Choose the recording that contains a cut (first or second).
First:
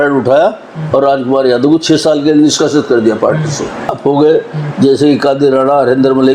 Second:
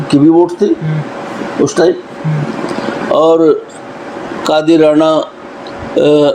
first